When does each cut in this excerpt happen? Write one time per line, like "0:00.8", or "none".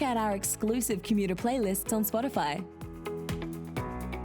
0:02.8

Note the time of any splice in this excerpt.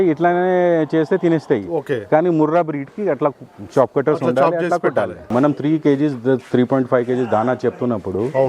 0:05.2

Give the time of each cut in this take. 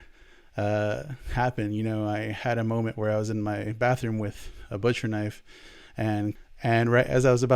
0:06.4

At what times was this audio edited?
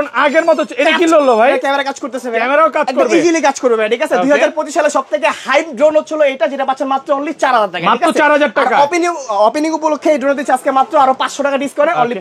none

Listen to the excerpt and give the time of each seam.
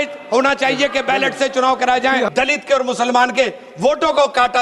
0:02.3

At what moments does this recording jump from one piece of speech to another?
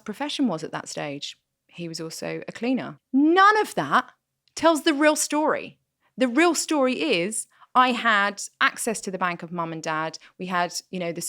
0:03.0

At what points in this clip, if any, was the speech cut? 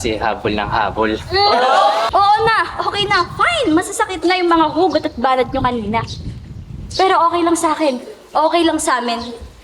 0:02.1

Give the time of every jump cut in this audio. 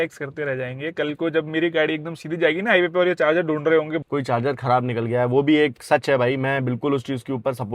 0:04.0

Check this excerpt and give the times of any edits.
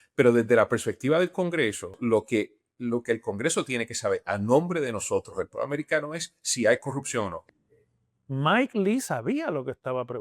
0:01.9
0:07.4

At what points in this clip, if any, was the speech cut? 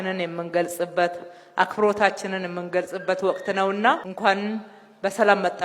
0:04.1

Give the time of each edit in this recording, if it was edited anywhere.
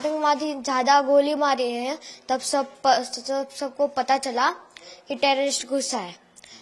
none

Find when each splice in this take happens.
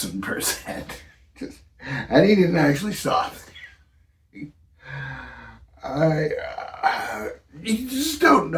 0:05.6

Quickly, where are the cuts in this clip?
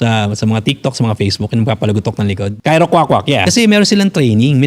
0:02.5
0:03.5

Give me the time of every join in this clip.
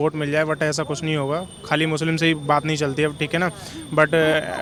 none

